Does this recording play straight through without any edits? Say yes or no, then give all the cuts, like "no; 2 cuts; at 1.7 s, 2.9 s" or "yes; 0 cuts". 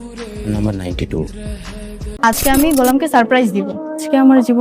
no; 1 cut; at 2.1 s